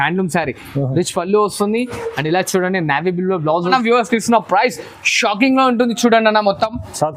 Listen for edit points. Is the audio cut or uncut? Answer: cut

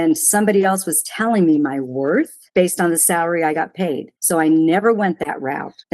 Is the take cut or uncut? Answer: cut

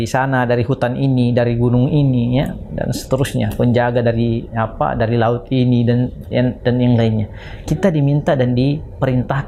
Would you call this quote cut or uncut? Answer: uncut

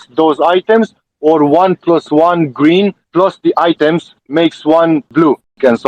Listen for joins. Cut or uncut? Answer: uncut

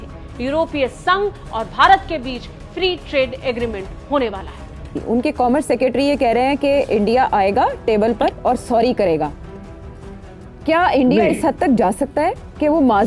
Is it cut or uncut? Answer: cut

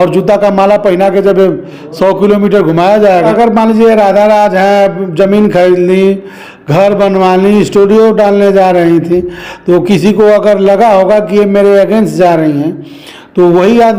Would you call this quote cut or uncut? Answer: uncut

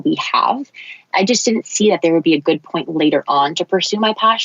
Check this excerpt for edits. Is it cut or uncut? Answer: cut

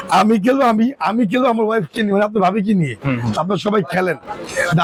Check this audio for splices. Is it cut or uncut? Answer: uncut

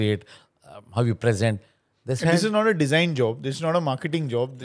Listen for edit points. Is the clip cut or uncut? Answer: uncut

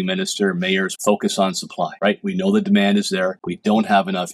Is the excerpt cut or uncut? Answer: cut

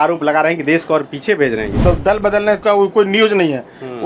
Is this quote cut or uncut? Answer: cut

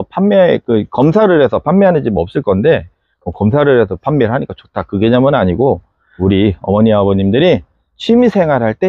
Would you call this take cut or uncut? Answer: uncut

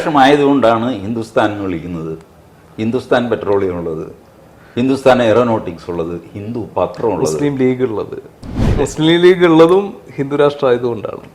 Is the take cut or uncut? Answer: cut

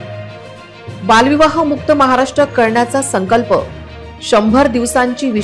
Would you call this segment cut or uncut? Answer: uncut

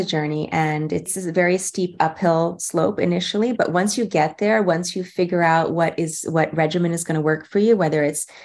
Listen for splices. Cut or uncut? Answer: cut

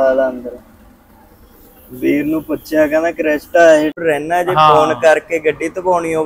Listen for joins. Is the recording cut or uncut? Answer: cut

